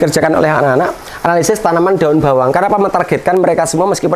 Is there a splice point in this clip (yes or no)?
no